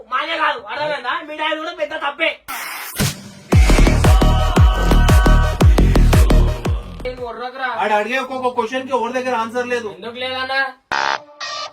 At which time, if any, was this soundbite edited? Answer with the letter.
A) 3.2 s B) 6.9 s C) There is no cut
B